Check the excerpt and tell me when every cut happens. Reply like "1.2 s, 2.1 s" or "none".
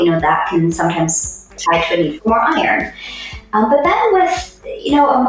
1.5 s